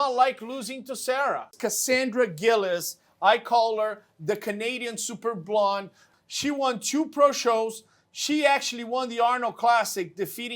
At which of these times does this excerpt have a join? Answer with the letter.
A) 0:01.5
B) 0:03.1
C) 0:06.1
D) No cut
A